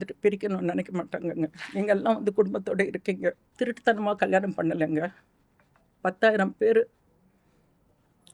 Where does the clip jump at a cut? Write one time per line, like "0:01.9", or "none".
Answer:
0:03.5